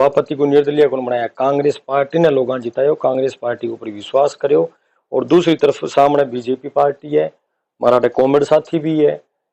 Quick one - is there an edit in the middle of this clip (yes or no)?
no